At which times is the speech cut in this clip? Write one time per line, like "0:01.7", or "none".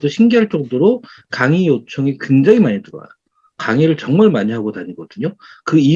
none